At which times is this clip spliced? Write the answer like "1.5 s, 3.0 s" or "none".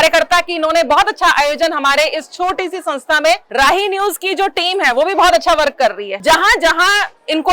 3.5 s, 6.1 s